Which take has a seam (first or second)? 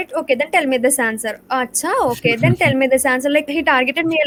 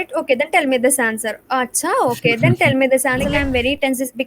second